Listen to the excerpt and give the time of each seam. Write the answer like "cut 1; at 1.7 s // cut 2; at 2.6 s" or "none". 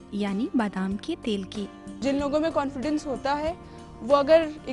cut 1; at 1.8 s